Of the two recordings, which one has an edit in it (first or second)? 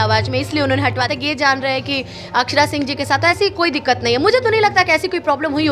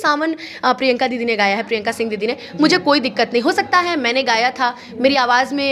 first